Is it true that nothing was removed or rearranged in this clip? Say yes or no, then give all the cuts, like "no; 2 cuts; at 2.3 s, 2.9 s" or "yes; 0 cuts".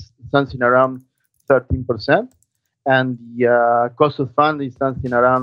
yes; 0 cuts